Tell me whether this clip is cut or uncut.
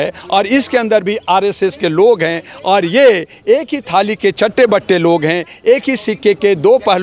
uncut